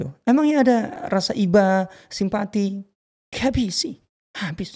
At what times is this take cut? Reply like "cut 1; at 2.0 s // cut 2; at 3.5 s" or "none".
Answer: cut 1; at 0.9 s